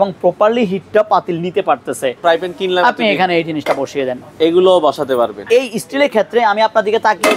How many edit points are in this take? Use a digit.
2